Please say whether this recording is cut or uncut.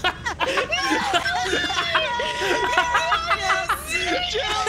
cut